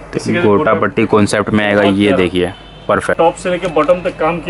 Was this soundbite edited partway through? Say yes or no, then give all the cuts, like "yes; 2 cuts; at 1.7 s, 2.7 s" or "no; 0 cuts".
yes; 1 cut; at 3.2 s